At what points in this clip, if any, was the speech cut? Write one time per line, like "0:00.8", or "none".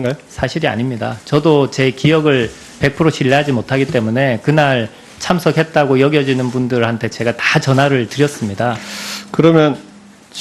0:07.9